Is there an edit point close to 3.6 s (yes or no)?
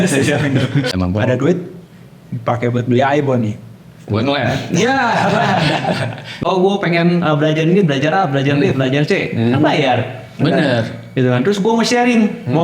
no